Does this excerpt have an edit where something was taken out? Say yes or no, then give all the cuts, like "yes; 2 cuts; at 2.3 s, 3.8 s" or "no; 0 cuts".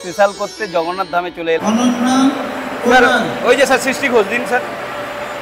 yes; 1 cut; at 1.6 s